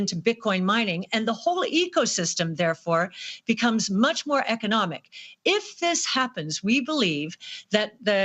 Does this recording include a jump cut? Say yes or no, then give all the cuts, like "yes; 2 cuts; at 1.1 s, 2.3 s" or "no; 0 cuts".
no; 0 cuts